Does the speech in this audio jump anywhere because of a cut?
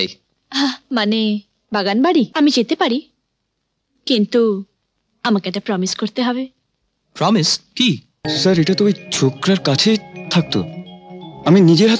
yes; 2 cuts; at 2.3 s, 8.2 s

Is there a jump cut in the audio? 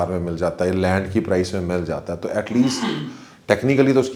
no; 0 cuts

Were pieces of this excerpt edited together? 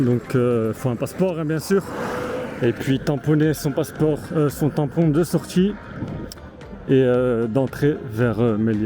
no; 0 cuts

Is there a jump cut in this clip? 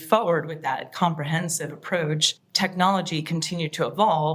no; 0 cuts

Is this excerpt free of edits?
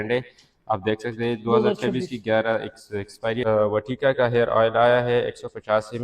no; 2 cuts; at 3.4 s, 5.1 s

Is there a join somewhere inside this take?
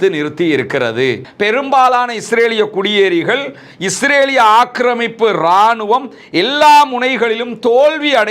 yes; 1 cut; at 1.3 s

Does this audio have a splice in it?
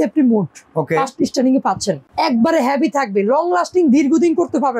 yes; 1 cut; at 2.1 s

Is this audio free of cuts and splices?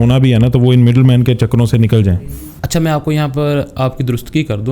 no; 1 cut; at 2.5 s

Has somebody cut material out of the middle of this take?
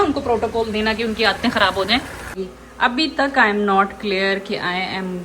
yes; 1 cut; at 2.3 s

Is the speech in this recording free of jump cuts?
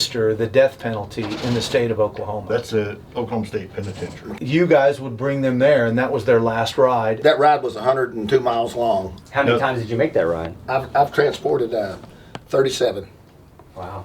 no; 3 cuts; at 4.3 s, 7.2 s, 9.1 s

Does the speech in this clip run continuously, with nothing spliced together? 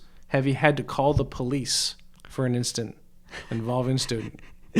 yes; 0 cuts

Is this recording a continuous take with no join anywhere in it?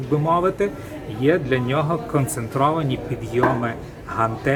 yes; 0 cuts

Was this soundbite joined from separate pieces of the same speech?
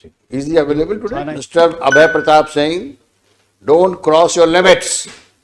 yes; 1 cut; at 1.3 s

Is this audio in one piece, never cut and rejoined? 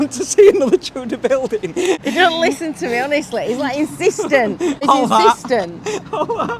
no; 2 cuts; at 2.0 s, 4.8 s

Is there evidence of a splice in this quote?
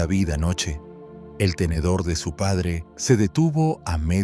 yes; 1 cut; at 2.9 s

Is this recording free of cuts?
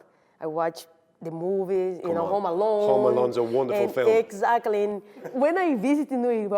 no; 1 cut; at 5.3 s

